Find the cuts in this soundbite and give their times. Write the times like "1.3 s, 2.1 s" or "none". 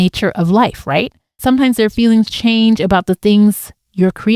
1.4 s